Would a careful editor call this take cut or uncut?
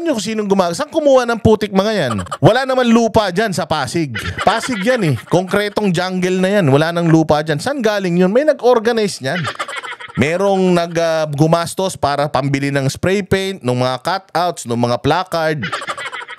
cut